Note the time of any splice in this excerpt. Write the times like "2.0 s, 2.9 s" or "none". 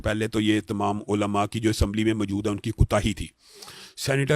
none